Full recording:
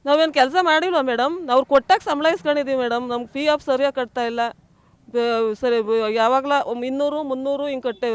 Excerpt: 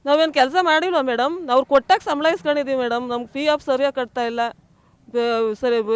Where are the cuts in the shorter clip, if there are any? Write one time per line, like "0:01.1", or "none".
none